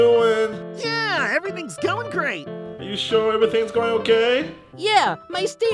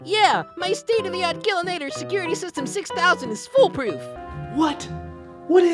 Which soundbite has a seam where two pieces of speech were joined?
second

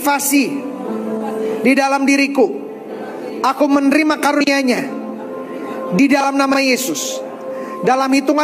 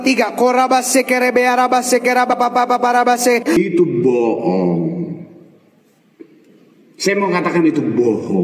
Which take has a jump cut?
second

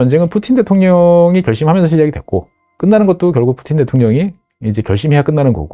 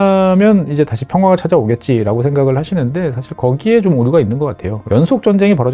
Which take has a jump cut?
second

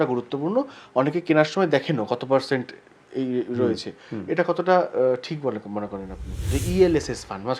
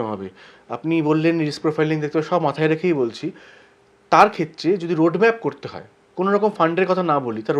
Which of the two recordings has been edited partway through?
first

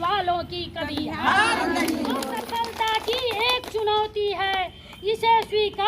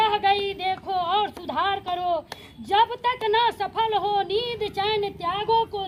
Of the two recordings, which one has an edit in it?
first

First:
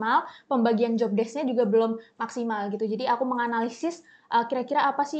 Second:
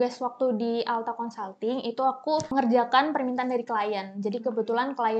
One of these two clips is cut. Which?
second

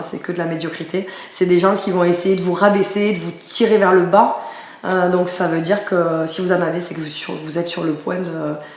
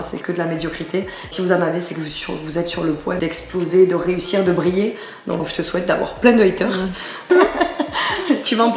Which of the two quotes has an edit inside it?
second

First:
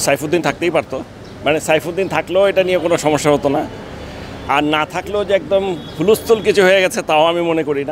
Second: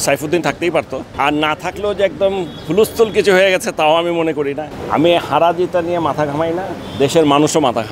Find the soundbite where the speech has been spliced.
second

